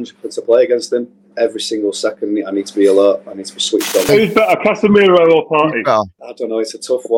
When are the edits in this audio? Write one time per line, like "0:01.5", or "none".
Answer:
0:01.2
0:04.1
0:06.2